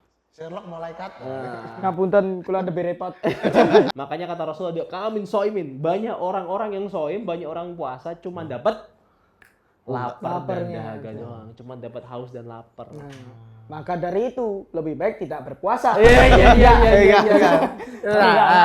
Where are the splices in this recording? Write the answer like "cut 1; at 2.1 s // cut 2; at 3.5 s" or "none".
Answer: cut 1; at 3.9 s